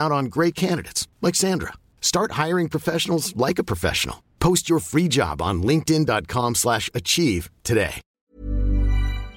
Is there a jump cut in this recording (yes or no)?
yes